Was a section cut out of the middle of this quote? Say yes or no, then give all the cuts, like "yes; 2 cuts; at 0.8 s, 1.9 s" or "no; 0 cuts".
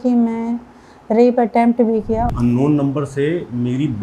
yes; 1 cut; at 2.3 s